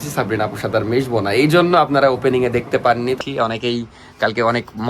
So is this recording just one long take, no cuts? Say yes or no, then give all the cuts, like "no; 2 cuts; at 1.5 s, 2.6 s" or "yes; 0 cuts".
no; 1 cut; at 3.2 s